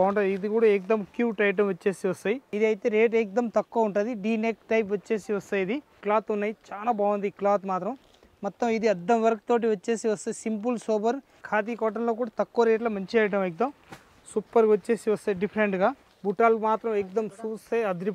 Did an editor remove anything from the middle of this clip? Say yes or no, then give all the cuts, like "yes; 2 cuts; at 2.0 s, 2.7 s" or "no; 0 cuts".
yes; 4 cuts; at 2.5 s, 5.8 s, 11.4 s, 16.1 s